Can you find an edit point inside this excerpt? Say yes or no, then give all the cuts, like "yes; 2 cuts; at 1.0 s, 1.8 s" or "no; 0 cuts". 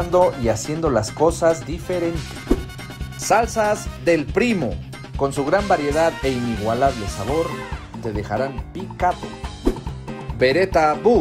no; 0 cuts